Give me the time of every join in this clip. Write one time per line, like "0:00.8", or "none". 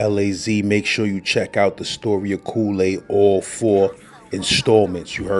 none

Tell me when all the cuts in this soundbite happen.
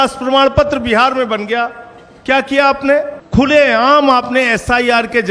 0:03.2

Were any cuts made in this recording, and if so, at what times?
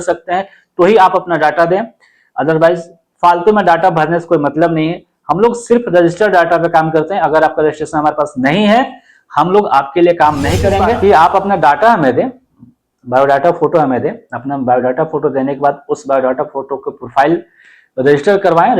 0:10.9

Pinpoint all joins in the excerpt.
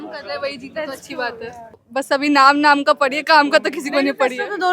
0:01.8

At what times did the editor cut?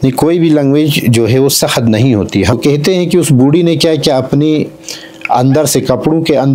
0:02.5

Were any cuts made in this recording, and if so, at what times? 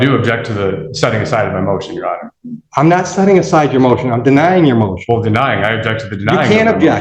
none

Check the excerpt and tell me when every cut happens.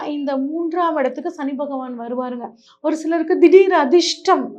0:02.6

